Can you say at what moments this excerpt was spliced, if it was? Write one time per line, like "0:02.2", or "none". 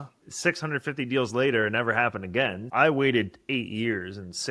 0:02.6